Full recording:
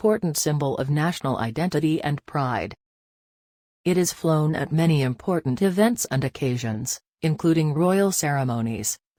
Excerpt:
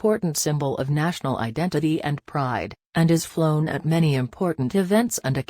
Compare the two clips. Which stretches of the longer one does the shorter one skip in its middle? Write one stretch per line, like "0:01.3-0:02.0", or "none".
0:03.3-0:04.1